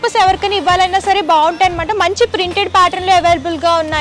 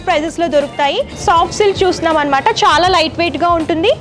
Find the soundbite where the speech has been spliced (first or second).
second